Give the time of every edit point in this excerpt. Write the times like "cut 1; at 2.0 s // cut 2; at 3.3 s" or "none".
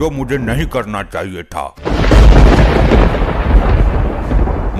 cut 1; at 1.7 s